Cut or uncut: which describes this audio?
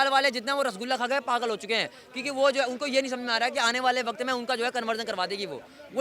uncut